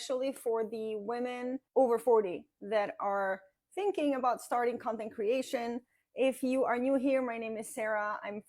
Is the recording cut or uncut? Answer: cut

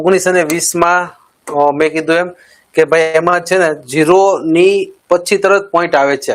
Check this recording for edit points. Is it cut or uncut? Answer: uncut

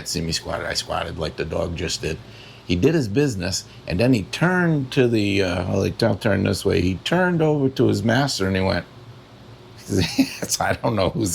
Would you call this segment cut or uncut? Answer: uncut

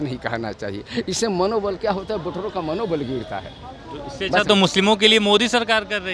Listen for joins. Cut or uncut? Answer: uncut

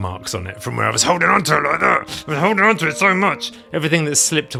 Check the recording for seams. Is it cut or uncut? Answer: uncut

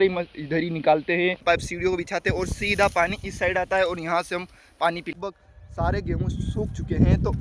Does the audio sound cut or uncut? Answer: cut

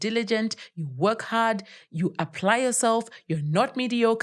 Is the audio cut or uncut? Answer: uncut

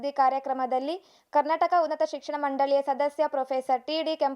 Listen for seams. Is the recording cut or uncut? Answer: uncut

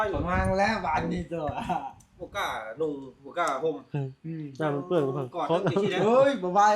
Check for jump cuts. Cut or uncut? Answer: uncut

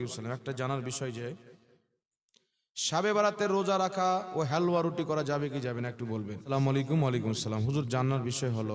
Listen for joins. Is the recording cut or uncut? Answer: cut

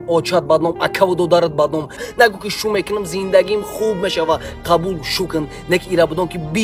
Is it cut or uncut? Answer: uncut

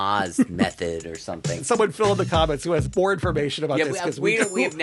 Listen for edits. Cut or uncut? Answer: cut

